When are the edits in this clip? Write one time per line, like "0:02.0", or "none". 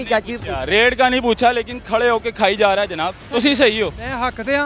0:03.3